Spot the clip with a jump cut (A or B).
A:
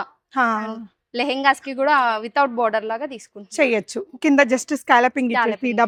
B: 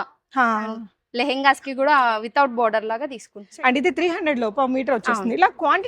B